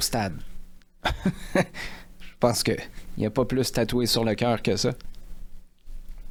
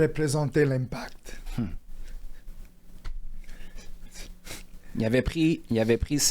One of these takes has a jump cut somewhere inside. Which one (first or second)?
second